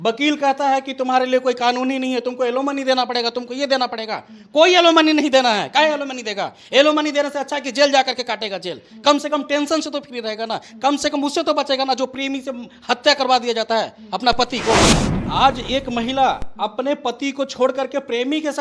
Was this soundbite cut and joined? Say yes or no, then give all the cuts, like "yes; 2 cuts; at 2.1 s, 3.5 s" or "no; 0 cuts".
yes; 1 cut; at 14.9 s